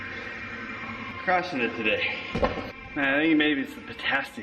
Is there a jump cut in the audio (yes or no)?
yes